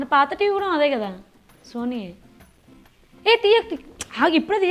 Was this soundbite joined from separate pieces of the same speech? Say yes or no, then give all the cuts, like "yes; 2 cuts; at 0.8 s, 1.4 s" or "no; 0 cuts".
no; 0 cuts